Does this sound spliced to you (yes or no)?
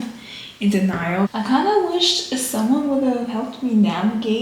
yes